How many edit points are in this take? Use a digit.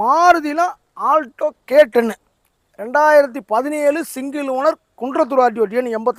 0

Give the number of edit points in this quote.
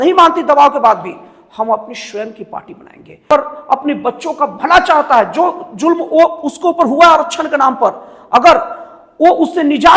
1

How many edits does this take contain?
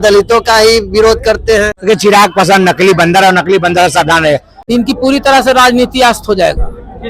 2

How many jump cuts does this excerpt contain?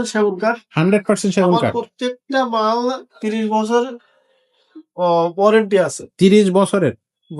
0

